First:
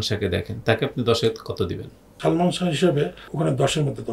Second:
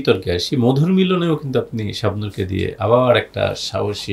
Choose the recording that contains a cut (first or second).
first